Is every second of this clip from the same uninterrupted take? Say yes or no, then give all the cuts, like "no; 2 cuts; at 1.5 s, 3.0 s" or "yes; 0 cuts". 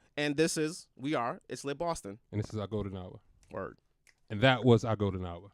yes; 0 cuts